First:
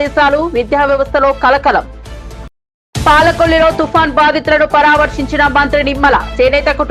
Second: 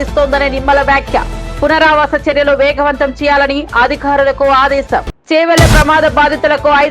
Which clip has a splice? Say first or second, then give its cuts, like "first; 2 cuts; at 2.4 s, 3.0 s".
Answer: second; 1 cut; at 5.1 s